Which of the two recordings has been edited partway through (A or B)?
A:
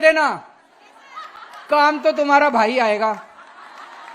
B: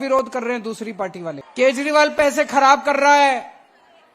B